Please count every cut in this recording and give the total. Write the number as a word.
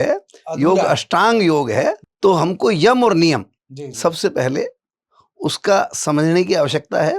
one